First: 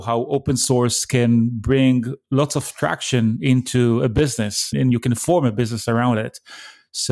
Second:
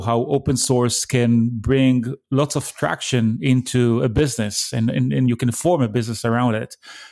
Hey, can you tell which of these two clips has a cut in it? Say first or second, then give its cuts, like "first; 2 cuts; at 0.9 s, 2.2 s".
first; 1 cut; at 4.7 s